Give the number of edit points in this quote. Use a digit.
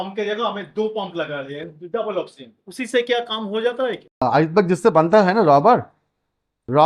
1